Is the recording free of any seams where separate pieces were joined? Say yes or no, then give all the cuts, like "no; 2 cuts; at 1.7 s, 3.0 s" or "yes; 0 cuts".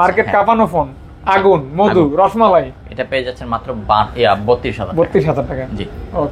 yes; 0 cuts